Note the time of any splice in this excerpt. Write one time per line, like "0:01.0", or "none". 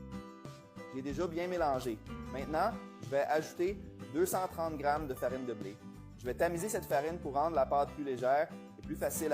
0:00.9